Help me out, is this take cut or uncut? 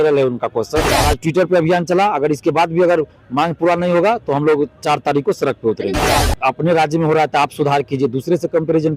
cut